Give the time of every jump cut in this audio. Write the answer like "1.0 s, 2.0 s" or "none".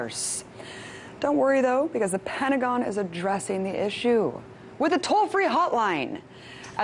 none